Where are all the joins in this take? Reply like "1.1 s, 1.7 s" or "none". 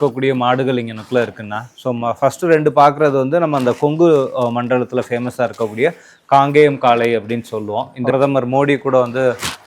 8.1 s